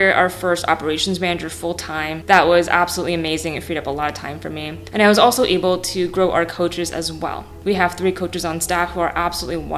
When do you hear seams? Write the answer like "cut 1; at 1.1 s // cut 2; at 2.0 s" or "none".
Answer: cut 1; at 2.2 s // cut 2; at 7.5 s